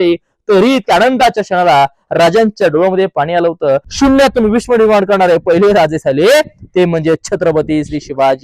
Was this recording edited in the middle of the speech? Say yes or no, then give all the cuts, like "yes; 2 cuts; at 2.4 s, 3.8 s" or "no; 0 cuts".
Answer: yes; 1 cut; at 3.9 s